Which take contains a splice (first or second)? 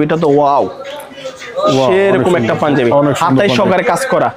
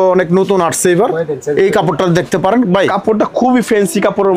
second